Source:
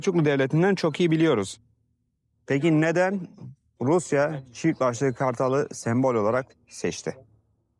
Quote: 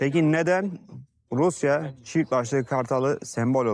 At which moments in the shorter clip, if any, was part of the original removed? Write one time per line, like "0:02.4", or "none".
none